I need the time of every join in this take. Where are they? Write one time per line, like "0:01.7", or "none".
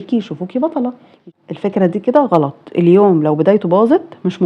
0:01.3